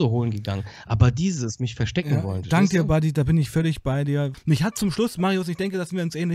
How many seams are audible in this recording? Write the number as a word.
one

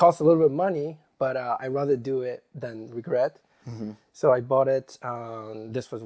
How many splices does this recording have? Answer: zero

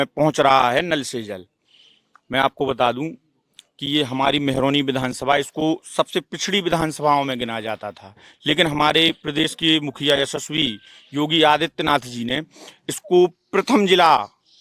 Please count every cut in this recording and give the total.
zero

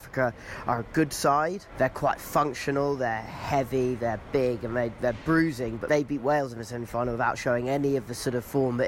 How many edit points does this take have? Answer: two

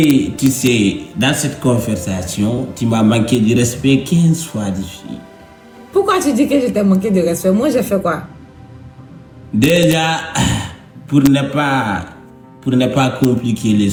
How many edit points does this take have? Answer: zero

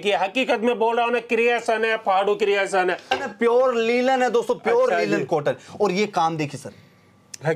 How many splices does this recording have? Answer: one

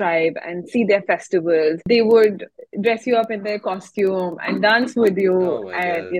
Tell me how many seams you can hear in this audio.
one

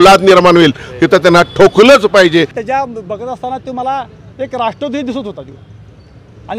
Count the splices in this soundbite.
one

